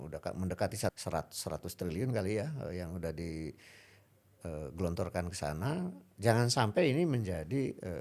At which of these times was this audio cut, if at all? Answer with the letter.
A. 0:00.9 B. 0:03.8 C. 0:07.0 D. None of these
A